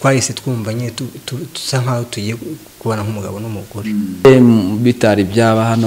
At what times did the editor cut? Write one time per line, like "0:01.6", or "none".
0:04.2